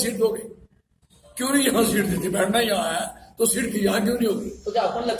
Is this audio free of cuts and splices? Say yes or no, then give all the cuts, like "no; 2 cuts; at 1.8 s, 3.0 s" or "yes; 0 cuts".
yes; 0 cuts